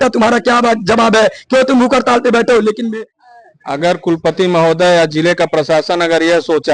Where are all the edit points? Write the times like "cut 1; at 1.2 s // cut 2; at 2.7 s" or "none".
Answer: cut 1; at 2.9 s